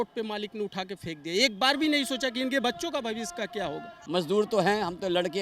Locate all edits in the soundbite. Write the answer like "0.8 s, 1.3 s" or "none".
4.0 s

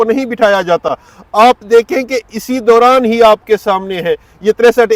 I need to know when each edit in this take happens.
none

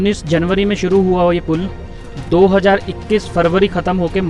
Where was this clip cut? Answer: none

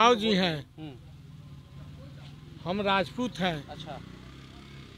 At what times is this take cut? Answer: none

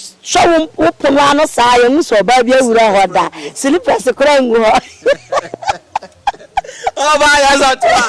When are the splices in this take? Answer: none

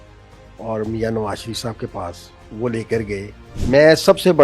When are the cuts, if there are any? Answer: 3.5 s

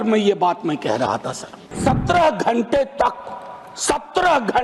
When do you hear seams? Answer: 1.8 s

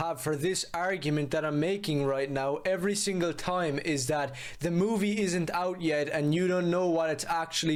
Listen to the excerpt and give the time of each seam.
none

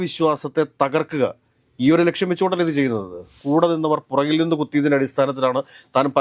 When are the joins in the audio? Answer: 3.3 s

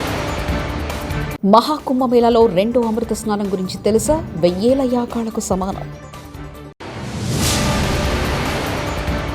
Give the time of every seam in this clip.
1.3 s

